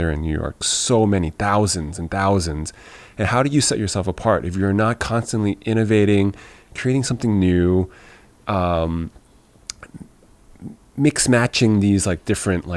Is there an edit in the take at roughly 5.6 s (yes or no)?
no